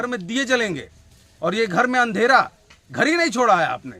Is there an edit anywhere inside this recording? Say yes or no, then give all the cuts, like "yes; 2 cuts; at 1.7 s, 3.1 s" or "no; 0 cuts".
no; 0 cuts